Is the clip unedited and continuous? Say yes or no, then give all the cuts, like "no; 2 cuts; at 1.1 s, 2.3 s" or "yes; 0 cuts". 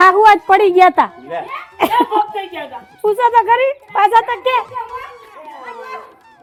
yes; 0 cuts